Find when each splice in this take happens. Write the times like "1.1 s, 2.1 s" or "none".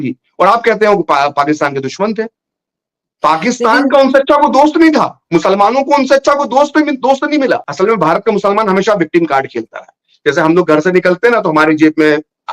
7.7 s